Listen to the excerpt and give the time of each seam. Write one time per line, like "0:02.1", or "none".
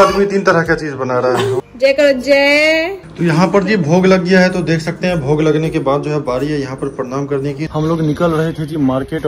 0:01.6
0:03.0
0:07.7